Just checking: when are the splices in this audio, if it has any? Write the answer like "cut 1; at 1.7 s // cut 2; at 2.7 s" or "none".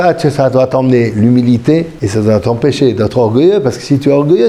cut 1; at 2.0 s